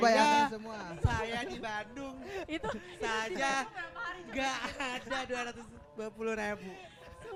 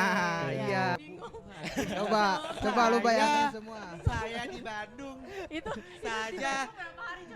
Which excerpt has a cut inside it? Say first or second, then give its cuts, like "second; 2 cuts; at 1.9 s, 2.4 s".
second; 1 cut; at 1.0 s